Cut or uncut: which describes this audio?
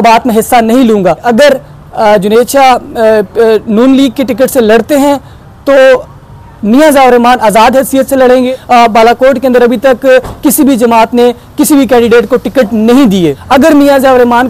cut